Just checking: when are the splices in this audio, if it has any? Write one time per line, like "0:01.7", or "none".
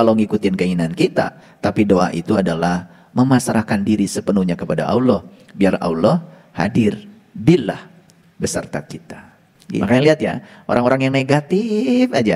0:09.8